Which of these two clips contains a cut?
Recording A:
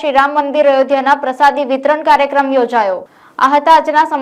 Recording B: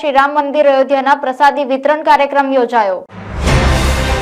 B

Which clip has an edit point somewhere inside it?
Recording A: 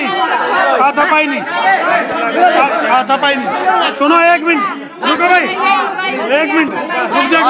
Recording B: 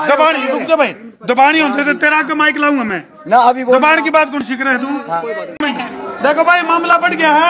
B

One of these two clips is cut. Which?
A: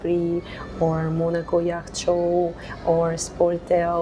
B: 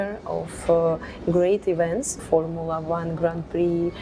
B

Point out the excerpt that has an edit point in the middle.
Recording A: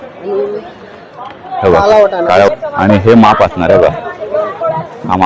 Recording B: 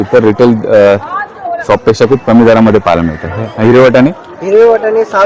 A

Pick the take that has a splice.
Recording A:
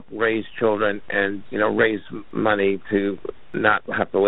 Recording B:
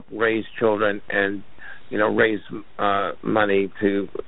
A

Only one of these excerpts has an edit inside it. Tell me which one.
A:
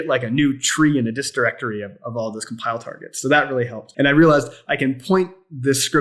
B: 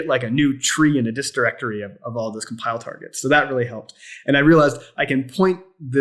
A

